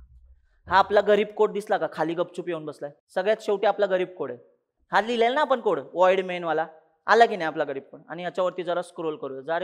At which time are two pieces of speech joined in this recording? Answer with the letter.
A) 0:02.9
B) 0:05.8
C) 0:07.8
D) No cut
A